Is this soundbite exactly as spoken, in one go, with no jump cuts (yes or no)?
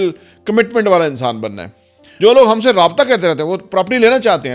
no